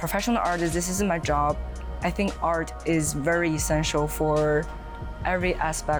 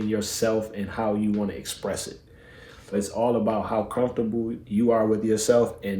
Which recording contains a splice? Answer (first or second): second